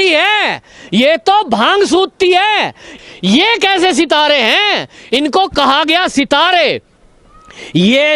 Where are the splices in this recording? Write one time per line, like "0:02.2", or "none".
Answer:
0:02.9